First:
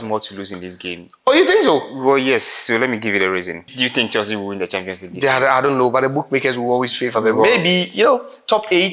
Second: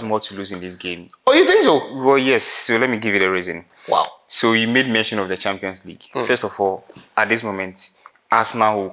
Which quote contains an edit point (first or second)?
first